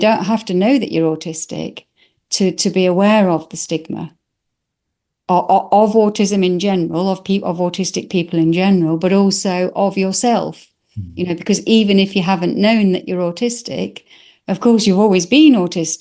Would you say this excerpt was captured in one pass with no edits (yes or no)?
yes